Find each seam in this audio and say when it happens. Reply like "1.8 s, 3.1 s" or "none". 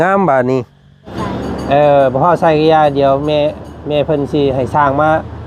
1.2 s